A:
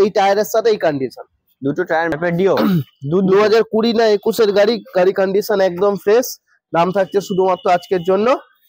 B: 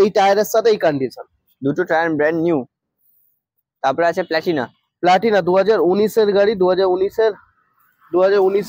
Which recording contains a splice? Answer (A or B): A